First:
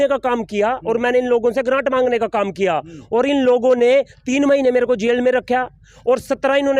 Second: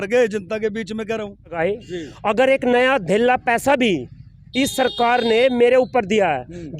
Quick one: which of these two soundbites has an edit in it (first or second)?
second